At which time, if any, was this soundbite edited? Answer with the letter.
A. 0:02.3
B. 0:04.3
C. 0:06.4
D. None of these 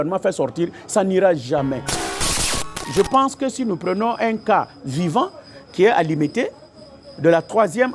A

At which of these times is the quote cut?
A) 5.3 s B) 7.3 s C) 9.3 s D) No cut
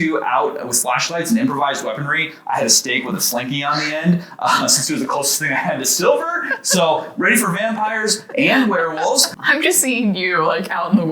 C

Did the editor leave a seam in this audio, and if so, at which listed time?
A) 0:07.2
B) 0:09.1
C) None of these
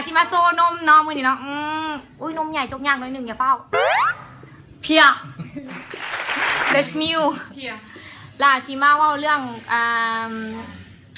A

